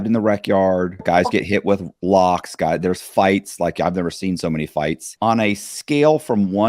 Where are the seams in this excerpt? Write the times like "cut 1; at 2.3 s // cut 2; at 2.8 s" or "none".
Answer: cut 1; at 1.0 s // cut 2; at 5.1 s